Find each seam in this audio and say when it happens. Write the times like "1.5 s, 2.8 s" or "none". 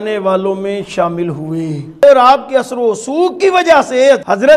2.0 s